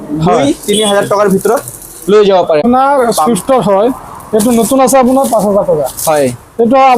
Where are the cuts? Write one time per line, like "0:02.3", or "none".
0:02.6